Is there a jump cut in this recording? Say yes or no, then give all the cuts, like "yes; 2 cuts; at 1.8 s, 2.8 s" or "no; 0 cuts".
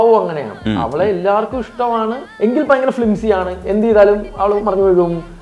yes; 1 cut; at 2.2 s